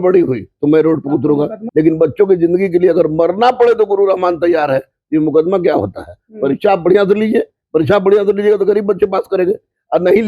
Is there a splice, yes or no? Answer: yes